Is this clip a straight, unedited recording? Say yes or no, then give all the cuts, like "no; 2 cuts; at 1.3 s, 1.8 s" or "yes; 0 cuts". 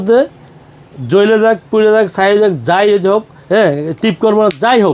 yes; 0 cuts